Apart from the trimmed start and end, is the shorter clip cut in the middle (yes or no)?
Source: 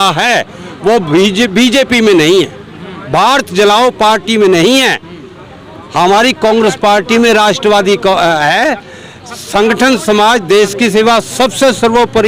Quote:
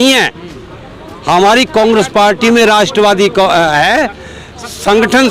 no